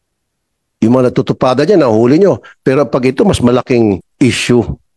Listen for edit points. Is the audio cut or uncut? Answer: cut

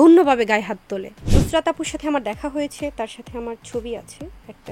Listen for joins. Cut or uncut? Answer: cut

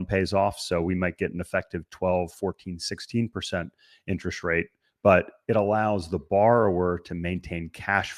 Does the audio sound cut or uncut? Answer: uncut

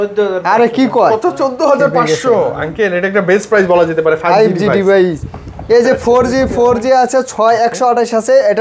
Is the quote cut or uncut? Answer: uncut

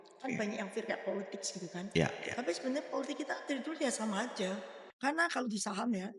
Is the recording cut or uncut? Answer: cut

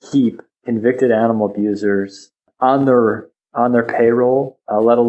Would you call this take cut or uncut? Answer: cut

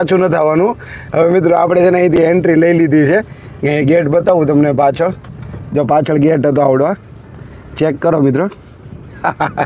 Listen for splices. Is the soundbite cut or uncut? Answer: uncut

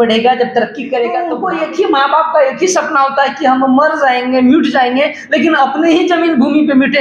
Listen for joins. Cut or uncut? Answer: cut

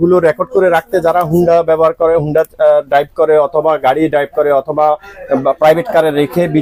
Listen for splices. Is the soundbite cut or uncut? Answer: uncut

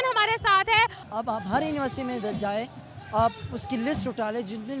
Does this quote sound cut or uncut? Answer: cut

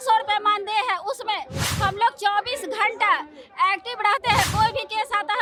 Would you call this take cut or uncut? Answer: uncut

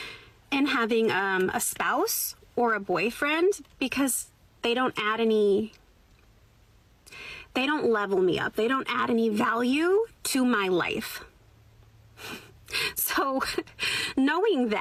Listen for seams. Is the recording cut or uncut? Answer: uncut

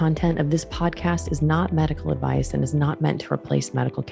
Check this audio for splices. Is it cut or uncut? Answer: uncut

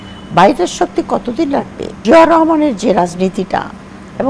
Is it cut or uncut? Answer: cut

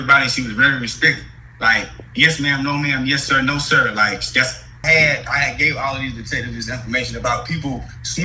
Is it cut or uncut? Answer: cut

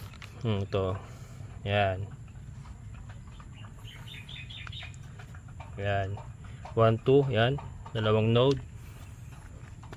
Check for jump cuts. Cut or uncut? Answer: uncut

